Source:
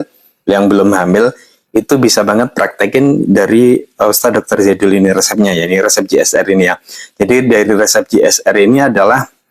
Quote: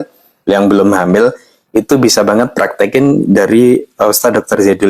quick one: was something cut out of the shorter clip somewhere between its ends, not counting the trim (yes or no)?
no